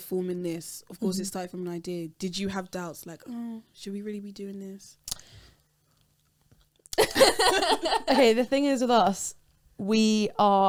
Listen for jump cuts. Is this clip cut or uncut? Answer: uncut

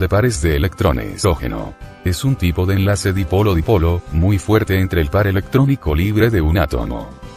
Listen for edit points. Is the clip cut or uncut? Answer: uncut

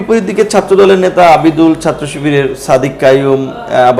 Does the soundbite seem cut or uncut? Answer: uncut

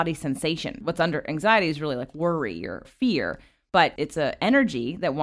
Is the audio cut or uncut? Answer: cut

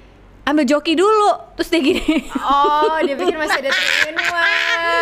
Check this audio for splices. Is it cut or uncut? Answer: uncut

